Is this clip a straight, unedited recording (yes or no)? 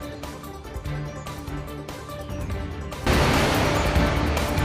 yes